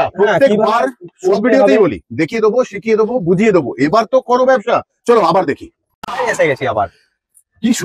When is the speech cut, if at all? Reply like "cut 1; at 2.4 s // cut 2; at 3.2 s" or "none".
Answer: cut 1; at 4.9 s